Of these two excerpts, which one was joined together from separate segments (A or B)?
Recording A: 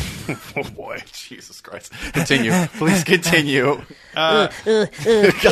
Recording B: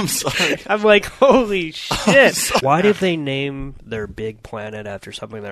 B